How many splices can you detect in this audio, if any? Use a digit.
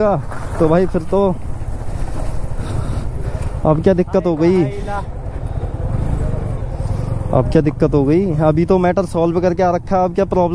0